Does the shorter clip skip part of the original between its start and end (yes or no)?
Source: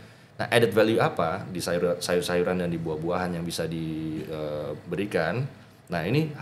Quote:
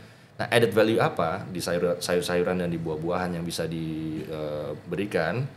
no